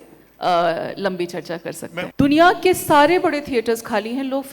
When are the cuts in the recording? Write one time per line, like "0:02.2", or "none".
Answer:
0:02.1